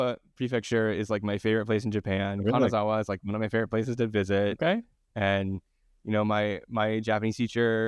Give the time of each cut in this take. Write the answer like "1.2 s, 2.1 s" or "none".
none

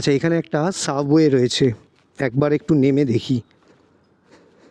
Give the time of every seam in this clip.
none

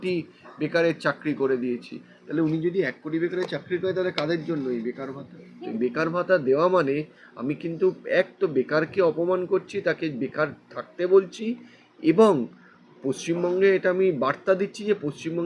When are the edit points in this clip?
5.6 s

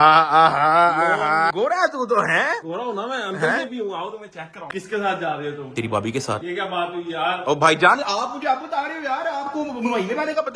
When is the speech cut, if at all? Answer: 1.5 s, 4.7 s

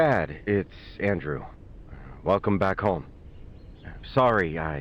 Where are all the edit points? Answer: 1.0 s

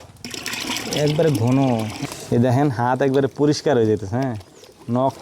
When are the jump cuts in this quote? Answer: 2.0 s

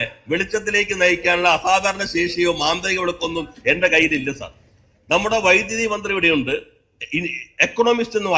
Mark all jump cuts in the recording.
none

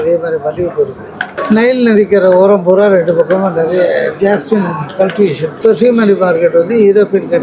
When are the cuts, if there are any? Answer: 1.3 s, 5.5 s

